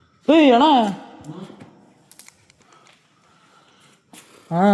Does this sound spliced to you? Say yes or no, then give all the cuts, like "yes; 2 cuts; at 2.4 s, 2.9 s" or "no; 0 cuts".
no; 0 cuts